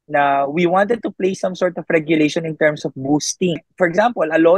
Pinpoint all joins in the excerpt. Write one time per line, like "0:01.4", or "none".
0:03.7